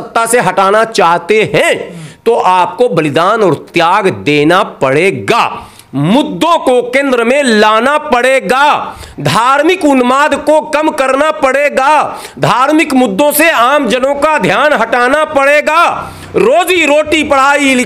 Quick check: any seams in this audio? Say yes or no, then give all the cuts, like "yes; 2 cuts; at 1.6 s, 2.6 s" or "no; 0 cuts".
no; 0 cuts